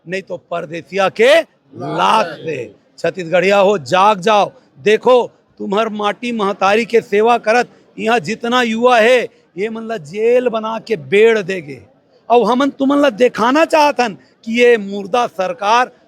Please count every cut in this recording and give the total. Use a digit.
0